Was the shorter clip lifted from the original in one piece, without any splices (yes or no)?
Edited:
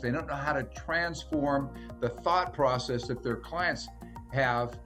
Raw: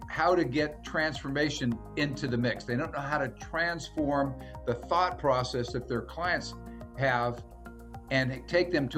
yes